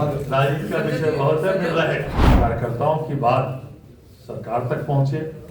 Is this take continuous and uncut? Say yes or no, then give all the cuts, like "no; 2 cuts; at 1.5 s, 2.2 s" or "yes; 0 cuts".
no; 1 cut; at 2.2 s